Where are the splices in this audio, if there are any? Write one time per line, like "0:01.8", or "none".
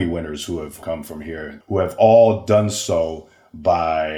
0:01.0